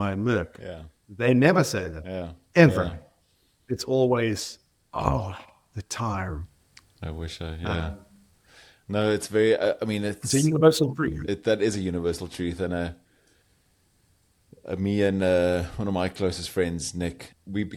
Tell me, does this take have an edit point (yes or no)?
no